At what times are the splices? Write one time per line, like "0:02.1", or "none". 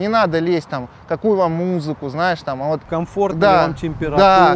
0:02.8

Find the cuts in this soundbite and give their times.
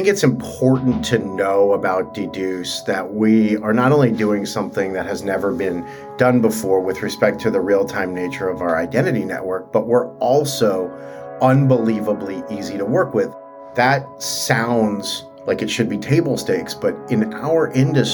0:13.4

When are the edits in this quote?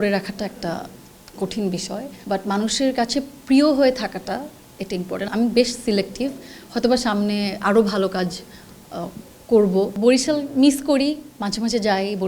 0:02.1
0:05.3
0:10.0

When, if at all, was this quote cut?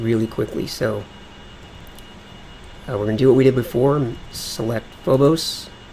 0:03.7

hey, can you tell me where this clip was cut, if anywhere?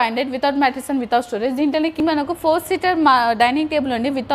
0:02.0

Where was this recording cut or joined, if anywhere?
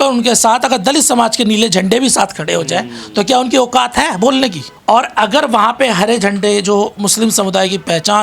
0:04.7

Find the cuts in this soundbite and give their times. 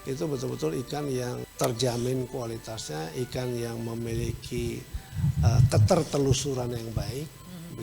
0:01.5

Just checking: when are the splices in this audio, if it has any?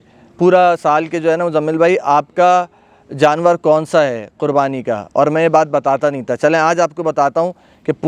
none

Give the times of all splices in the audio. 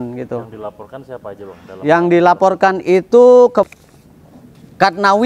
0:03.7

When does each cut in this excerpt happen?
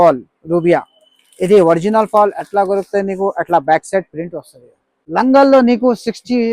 0:05.0

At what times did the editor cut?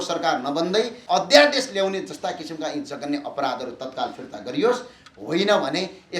0:01.0

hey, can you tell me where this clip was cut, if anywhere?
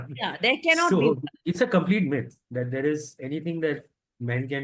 0:01.3

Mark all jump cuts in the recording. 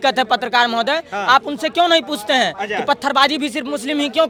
none

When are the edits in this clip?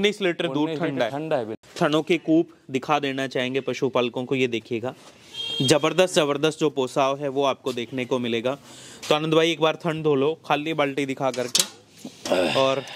0:01.6

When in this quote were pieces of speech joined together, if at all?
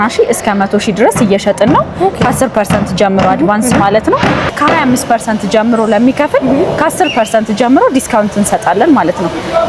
0:04.5

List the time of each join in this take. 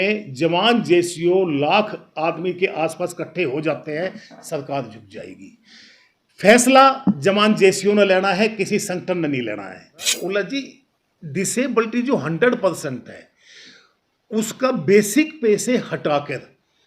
0:10.2

